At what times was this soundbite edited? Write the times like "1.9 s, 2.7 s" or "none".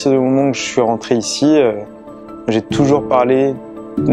none